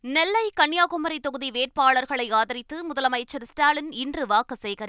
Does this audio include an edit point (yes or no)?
no